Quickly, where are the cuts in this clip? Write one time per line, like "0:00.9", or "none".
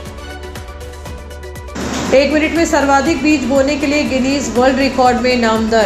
0:00.9